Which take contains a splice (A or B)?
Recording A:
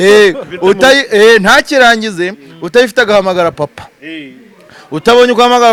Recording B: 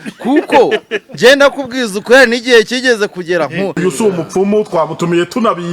B